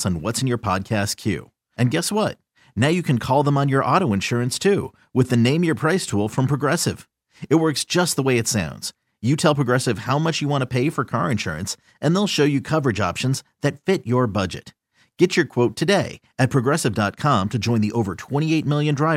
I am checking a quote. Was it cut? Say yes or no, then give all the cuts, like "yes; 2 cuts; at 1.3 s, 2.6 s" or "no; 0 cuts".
no; 0 cuts